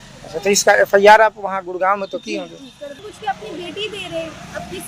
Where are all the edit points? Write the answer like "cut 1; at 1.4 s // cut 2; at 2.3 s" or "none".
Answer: cut 1; at 3.0 s